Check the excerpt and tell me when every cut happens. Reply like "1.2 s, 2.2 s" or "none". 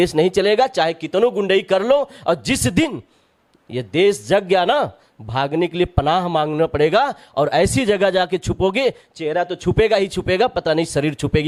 none